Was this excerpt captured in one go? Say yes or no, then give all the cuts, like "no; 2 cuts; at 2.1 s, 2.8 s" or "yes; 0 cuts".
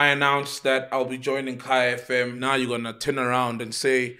no; 1 cut; at 2.4 s